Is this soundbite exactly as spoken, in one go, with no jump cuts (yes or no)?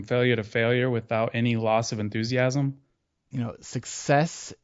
no